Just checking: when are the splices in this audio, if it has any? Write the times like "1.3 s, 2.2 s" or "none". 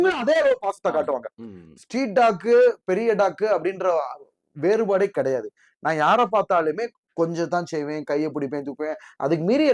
none